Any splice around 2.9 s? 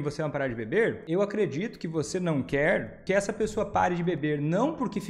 yes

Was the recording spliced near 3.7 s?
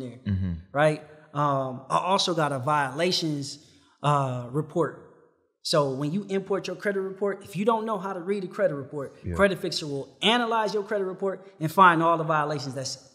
no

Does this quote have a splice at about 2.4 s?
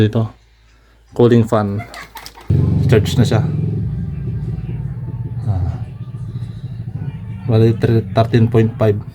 yes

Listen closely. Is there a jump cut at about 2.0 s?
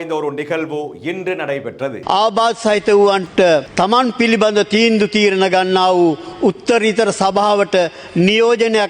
yes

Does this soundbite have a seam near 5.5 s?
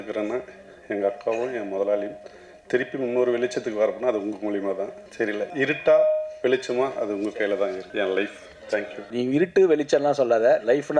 yes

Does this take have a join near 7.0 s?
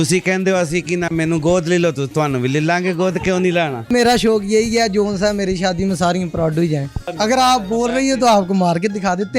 yes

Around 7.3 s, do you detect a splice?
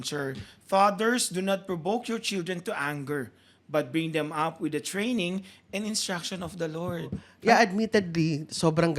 yes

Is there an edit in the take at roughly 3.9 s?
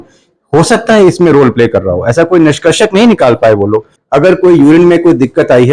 yes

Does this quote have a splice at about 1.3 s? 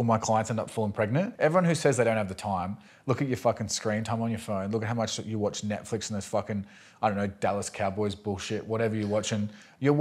yes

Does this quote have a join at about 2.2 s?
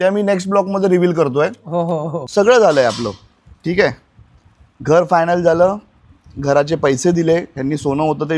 yes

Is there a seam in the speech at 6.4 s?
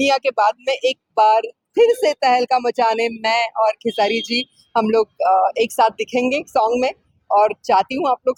no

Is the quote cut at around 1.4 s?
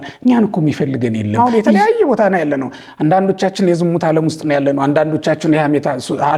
yes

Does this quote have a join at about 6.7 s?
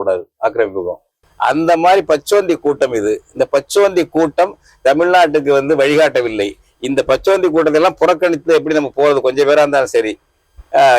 no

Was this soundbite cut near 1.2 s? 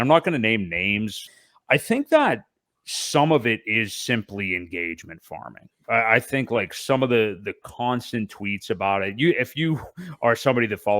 yes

